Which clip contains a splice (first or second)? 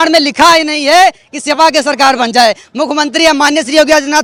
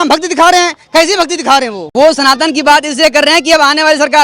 second